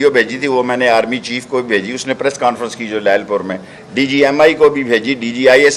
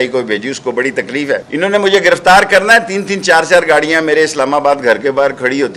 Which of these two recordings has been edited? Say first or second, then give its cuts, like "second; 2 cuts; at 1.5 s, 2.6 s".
second; 1 cut; at 1.4 s